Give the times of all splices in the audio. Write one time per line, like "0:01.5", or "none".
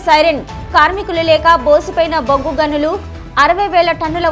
none